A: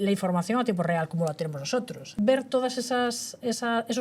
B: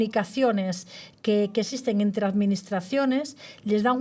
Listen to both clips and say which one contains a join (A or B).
A